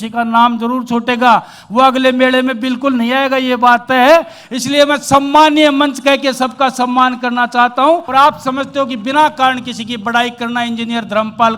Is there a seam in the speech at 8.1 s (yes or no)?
yes